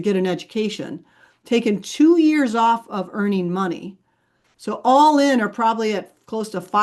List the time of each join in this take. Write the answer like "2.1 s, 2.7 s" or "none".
none